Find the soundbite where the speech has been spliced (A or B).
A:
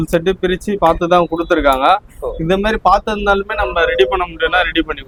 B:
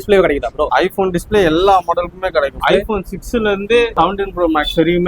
B